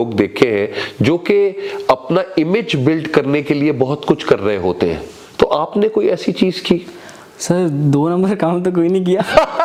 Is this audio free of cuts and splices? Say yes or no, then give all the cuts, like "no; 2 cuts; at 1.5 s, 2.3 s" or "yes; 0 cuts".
yes; 0 cuts